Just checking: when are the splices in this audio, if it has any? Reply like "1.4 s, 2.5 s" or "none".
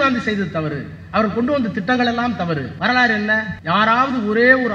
2.7 s, 3.5 s